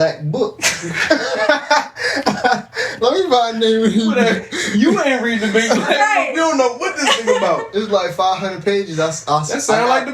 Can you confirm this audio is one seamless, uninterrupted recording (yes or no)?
yes